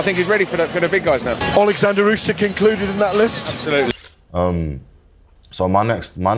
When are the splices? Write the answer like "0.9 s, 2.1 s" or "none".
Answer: 4.1 s